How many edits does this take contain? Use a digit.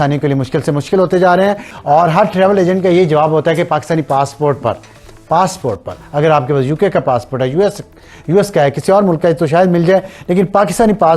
1